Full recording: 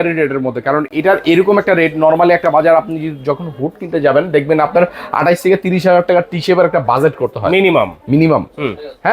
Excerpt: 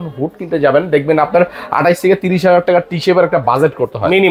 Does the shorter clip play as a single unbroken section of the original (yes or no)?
yes